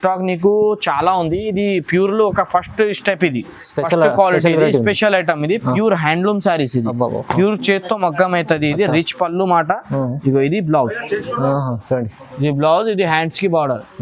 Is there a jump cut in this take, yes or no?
no